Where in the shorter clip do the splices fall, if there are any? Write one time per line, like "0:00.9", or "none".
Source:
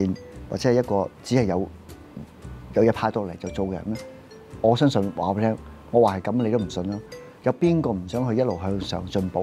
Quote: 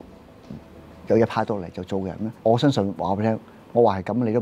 0:02.3